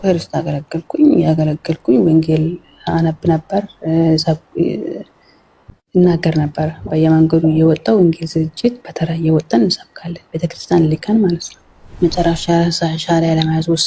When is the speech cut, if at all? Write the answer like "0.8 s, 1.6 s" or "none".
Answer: 12.0 s